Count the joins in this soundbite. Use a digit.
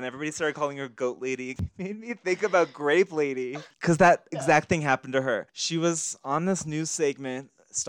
3